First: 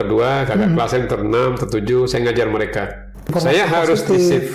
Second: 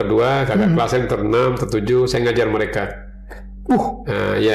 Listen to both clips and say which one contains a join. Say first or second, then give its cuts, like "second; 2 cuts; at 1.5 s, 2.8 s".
first; 1 cut; at 3.3 s